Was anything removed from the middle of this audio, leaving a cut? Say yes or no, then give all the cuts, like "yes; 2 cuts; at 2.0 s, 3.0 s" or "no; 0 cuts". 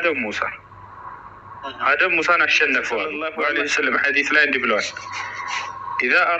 yes; 1 cut; at 3.2 s